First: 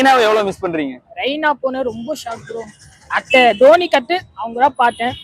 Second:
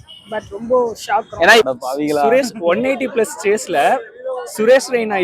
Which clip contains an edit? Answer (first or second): second